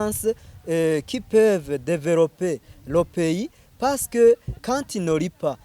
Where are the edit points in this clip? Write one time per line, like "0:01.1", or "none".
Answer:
0:04.6